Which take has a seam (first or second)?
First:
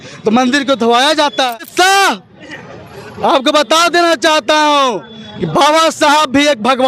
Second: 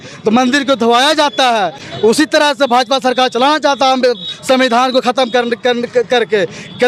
first